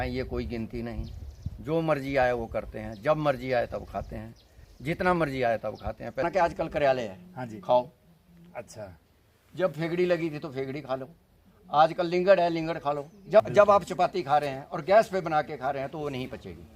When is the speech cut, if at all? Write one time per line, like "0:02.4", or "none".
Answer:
0:06.2
0:13.5

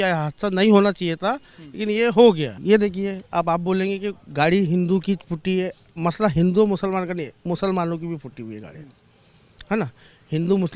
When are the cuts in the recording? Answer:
0:02.6

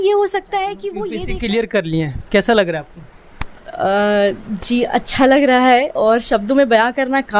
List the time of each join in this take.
0:01.0

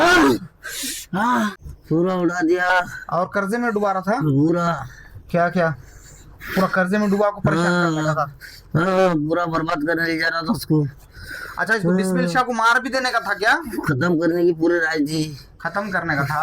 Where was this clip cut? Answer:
0:01.7

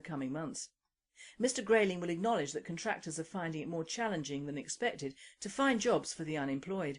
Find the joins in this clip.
none

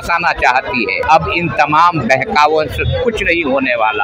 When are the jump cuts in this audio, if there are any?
0:01.0

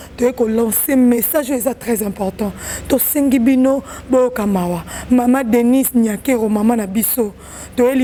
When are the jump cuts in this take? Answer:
none

